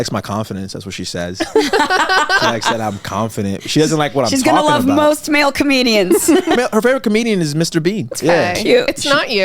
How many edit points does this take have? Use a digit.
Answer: 3